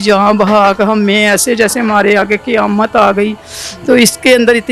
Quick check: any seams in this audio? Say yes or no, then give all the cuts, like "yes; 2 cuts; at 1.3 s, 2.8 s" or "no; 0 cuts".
no; 0 cuts